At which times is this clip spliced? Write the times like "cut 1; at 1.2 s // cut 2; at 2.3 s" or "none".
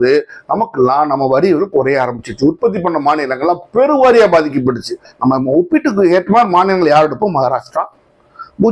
cut 1; at 5.1 s

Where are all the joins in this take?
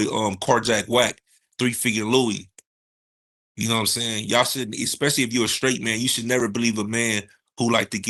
none

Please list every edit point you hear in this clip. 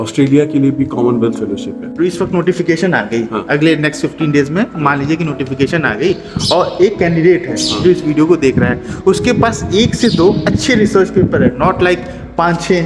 cut 1; at 1.8 s

